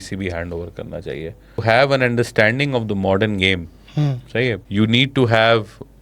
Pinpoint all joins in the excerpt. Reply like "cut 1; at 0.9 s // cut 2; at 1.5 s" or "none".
cut 1; at 1.6 s // cut 2; at 4.6 s